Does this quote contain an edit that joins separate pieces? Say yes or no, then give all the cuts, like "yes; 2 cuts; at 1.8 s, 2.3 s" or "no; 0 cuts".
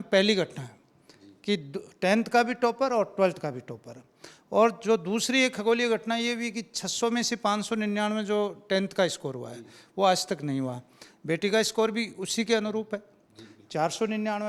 no; 0 cuts